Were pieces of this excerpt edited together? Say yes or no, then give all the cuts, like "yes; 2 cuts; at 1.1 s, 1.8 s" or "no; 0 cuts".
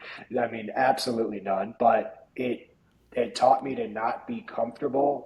yes; 1 cut; at 1.7 s